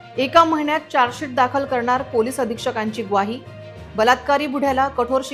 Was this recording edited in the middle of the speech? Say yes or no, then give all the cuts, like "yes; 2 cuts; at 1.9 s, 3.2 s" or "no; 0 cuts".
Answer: no; 0 cuts